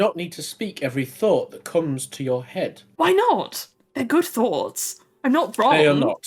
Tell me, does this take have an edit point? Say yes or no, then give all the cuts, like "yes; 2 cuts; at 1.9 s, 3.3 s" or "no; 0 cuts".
no; 0 cuts